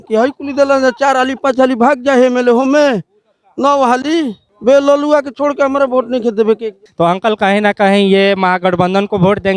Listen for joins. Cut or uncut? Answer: uncut